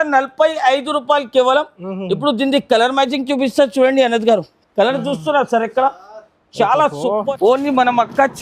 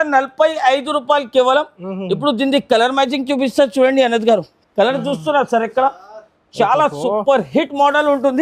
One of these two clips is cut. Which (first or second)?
first